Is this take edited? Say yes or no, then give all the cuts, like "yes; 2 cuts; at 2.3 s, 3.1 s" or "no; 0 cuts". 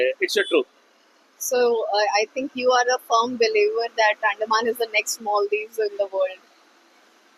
no; 0 cuts